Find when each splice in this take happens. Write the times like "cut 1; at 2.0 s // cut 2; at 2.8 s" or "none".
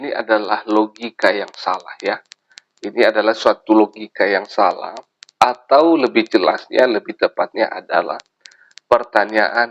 none